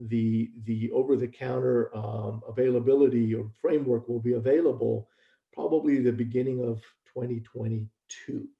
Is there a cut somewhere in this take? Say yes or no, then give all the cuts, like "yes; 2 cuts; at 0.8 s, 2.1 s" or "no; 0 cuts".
no; 0 cuts